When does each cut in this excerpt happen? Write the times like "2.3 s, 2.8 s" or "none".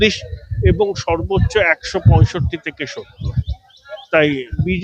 none